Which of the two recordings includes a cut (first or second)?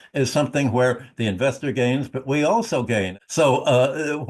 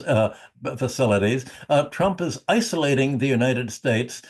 first